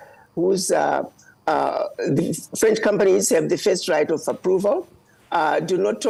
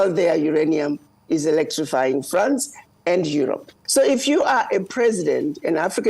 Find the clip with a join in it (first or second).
second